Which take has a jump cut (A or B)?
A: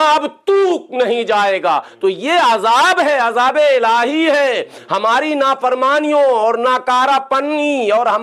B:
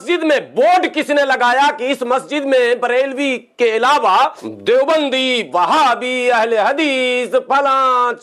B